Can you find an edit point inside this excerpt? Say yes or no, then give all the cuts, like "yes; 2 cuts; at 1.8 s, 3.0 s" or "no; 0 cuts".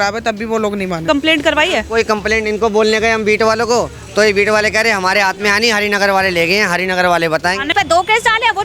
yes; 2 cuts; at 1.1 s, 7.7 s